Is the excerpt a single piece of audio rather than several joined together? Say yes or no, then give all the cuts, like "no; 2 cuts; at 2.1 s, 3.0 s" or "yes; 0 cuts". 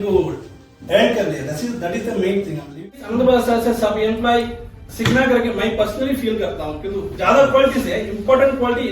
no; 1 cut; at 2.9 s